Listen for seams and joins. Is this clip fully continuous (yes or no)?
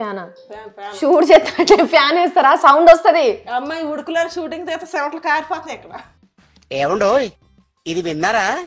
yes